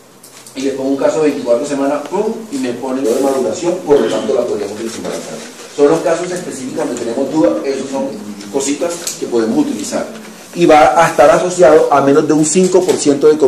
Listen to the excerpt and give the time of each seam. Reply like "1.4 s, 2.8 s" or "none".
none

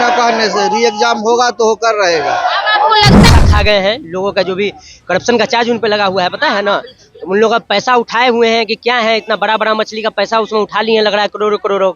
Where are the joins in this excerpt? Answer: 3.3 s

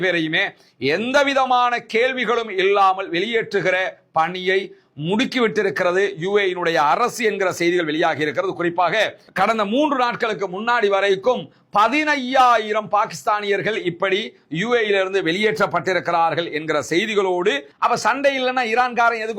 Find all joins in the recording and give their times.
9.2 s, 17.7 s

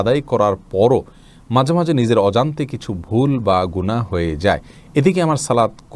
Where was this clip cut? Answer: none

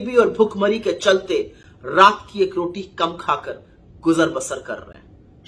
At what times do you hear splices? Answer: none

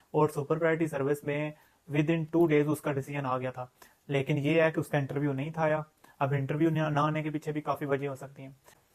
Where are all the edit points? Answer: none

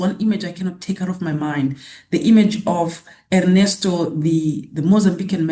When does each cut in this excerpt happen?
none

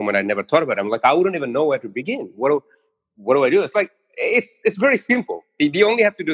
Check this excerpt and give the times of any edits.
none

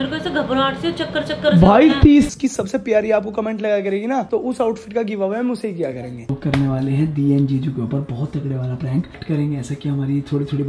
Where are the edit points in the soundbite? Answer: 2.3 s, 6.3 s, 9.2 s

